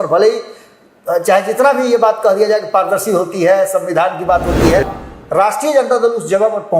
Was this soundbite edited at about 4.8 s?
yes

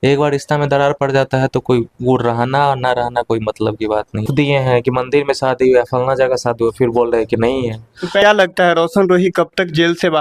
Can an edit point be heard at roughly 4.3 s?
yes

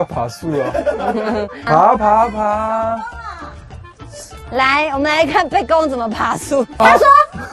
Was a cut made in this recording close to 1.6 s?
yes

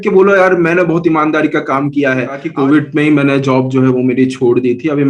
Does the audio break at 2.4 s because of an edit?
yes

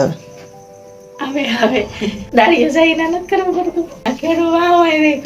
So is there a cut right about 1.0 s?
no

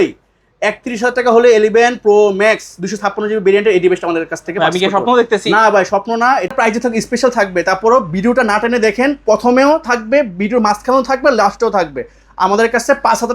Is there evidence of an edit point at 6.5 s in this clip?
yes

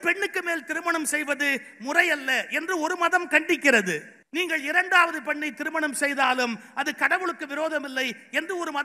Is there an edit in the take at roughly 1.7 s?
no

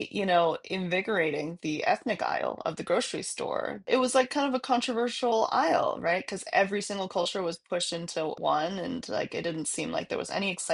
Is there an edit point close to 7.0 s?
no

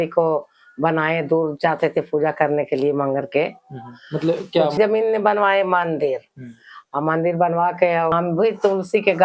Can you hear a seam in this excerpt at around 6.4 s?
no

